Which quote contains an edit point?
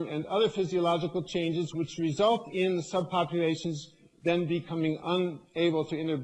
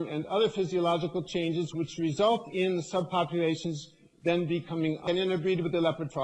first; 1 cut; at 5.0 s

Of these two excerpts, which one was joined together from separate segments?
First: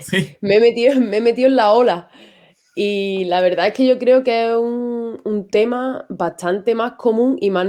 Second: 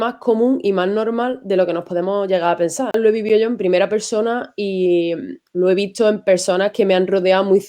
second; 1 cut; at 3.0 s

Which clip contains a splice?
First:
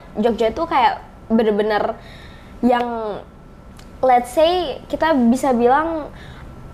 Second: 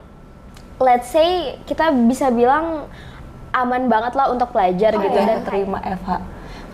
second; 1 cut; at 5.4 s

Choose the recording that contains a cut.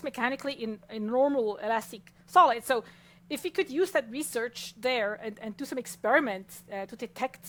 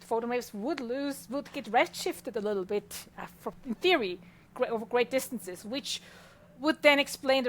second; 1 cut; at 3.6 s

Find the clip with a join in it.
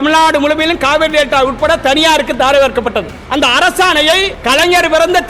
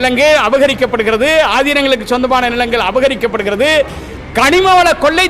first; 2 cuts; at 3.2 s, 4.3 s

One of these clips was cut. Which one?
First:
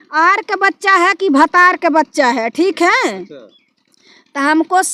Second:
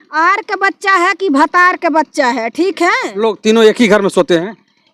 second; 1 cut; at 3.3 s

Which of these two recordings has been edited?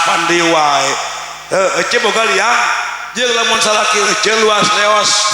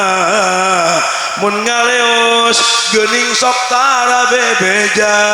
first; 1 cut; at 3.6 s

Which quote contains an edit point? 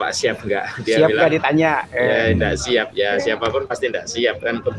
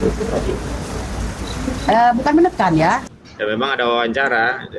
second; 1 cut; at 3.0 s

